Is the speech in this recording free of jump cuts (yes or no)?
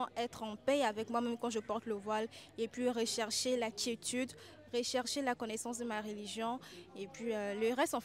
yes